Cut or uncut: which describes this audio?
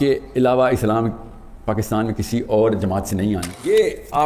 cut